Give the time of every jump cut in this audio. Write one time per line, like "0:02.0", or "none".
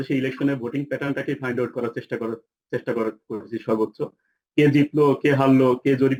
none